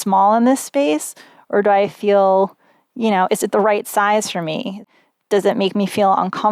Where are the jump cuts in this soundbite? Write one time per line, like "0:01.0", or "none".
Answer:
0:05.0